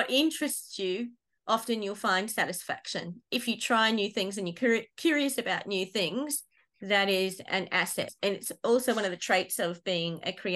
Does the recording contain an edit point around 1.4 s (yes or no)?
no